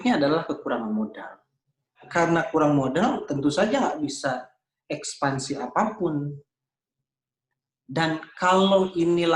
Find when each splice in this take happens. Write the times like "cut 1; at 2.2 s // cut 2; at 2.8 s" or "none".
cut 1; at 2.0 s